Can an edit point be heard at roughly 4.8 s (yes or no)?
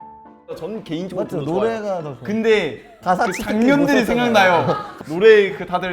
yes